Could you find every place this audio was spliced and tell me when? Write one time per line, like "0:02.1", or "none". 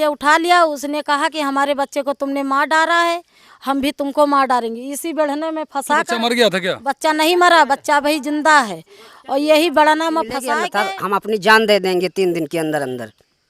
0:10.6